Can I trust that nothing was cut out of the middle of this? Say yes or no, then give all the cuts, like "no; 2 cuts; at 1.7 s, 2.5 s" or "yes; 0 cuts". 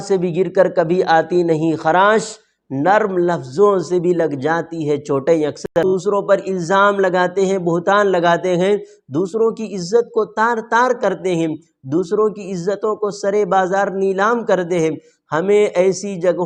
no; 1 cut; at 5.8 s